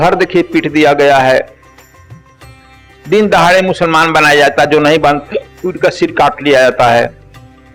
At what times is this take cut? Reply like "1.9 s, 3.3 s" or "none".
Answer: none